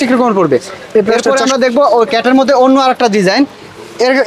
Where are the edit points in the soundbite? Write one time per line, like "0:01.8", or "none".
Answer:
0:01.2